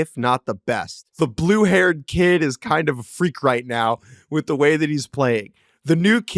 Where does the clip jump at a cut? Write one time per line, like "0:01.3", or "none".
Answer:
0:01.0